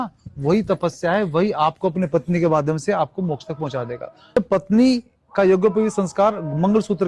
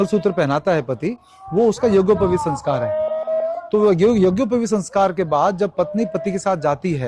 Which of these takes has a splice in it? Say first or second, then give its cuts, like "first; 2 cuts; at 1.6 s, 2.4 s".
first; 1 cut; at 4.4 s